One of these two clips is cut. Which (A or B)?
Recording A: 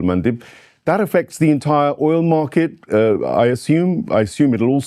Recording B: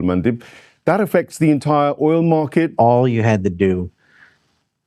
B